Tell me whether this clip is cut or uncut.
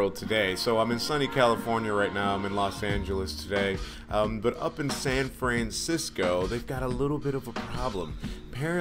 cut